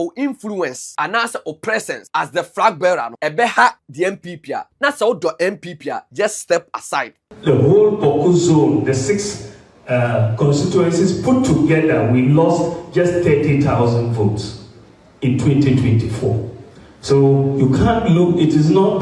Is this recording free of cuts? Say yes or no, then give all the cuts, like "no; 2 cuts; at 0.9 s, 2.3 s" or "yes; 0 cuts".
no; 6 cuts; at 0.8 s, 2.0 s, 3.1 s, 4.3 s, 6.0 s, 7.2 s